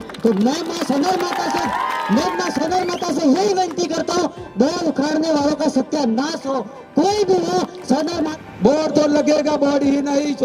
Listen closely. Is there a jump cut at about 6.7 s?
no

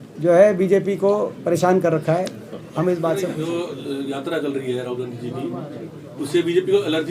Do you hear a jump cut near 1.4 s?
no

